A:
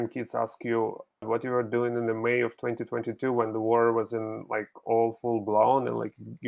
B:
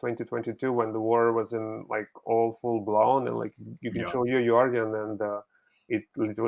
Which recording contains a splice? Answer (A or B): A